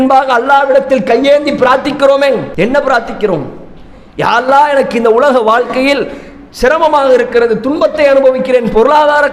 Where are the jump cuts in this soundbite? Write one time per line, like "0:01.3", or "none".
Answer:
none